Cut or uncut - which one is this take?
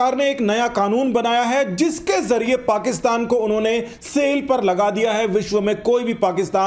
uncut